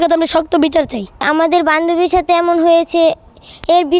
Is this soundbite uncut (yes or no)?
yes